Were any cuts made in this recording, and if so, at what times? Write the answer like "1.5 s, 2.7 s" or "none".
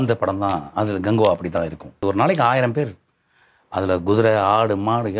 2.0 s